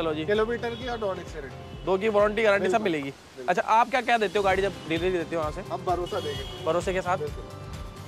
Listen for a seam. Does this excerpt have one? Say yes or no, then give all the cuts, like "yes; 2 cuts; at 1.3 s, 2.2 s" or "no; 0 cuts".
no; 0 cuts